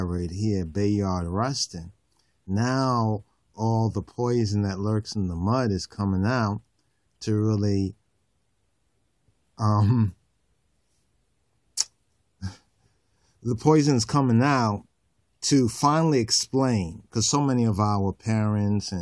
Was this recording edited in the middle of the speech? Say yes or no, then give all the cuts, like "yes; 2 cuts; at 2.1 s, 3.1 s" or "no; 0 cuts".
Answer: yes; 1 cut; at 8.4 s